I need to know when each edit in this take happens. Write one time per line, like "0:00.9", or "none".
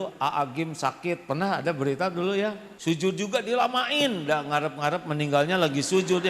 0:02.7